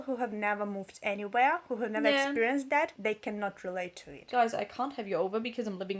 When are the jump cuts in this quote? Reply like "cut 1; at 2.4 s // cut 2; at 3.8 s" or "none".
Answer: cut 1; at 2.9 s // cut 2; at 4.2 s